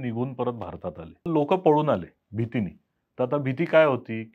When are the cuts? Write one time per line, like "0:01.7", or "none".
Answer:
0:01.3